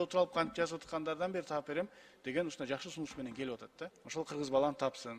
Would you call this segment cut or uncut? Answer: cut